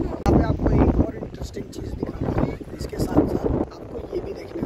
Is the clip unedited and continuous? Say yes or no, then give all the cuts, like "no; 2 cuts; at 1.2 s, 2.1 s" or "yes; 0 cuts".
yes; 0 cuts